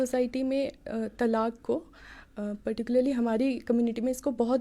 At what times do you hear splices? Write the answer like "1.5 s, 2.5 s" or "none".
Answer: none